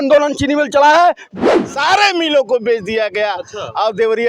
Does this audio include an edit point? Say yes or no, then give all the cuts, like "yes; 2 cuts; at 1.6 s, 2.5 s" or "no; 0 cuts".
yes; 1 cut; at 1.3 s